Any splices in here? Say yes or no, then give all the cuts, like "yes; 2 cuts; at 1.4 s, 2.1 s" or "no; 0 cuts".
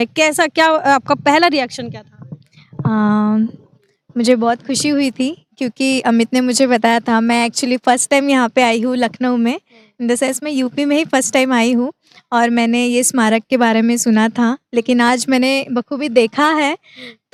no; 0 cuts